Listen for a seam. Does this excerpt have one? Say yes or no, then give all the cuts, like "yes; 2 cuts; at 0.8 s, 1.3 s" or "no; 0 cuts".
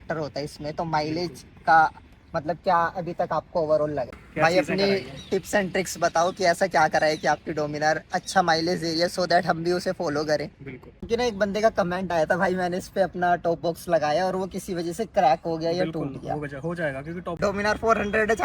yes; 3 cuts; at 4.2 s, 11.0 s, 17.3 s